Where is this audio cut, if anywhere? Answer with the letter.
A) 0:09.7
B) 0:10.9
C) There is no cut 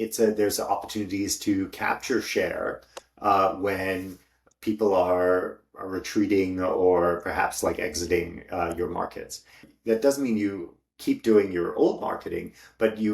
A